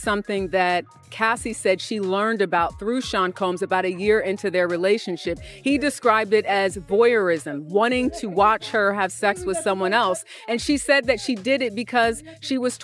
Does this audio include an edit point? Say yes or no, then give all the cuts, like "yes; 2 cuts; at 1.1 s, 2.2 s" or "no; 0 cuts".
no; 0 cuts